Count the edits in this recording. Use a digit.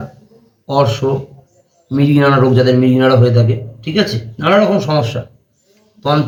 0